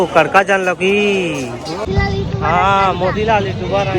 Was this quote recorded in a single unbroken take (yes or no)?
no